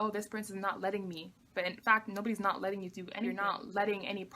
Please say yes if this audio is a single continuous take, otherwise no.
no